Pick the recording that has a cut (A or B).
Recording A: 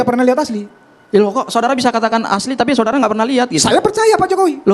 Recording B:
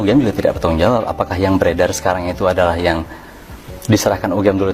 A